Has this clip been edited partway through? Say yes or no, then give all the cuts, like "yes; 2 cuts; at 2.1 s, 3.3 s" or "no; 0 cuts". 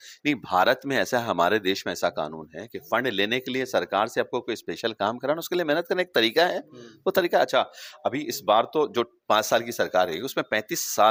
no; 0 cuts